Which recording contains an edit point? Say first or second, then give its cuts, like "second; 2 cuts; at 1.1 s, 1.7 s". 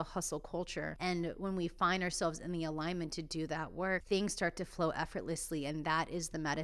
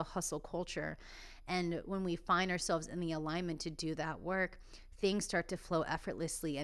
first; 2 cuts; at 0.9 s, 4.0 s